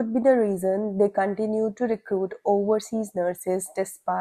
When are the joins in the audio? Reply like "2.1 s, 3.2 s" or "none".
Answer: none

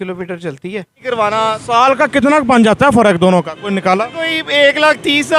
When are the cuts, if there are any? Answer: 1.0 s

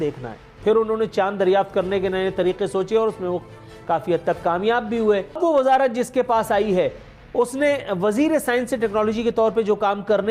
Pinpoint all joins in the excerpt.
5.4 s

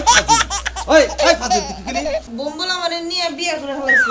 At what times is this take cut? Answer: 2.3 s

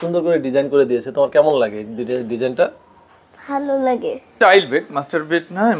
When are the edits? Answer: 4.4 s

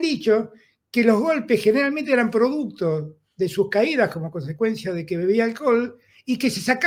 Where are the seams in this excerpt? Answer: none

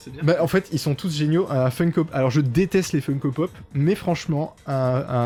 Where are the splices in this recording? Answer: none

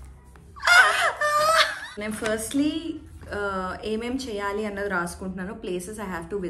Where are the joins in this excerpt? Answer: 1.8 s

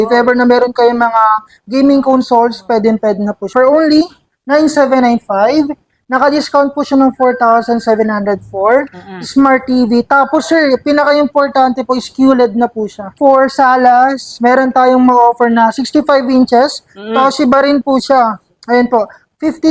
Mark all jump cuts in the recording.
3.5 s, 13.2 s

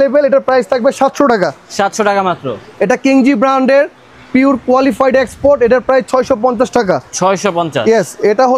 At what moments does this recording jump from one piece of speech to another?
none

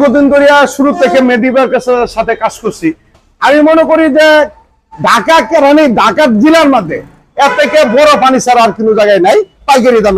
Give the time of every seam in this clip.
3.2 s

